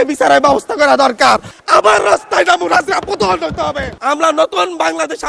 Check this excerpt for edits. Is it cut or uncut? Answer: cut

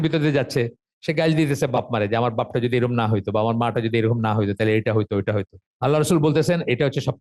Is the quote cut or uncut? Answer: cut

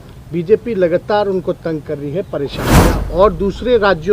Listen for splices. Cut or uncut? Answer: cut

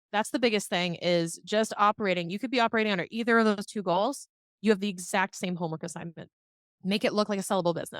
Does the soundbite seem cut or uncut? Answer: cut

